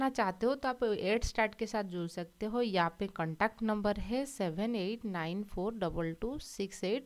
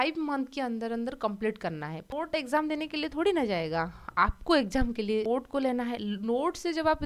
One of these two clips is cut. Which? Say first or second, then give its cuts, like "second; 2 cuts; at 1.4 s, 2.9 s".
second; 2 cuts; at 2.1 s, 5.3 s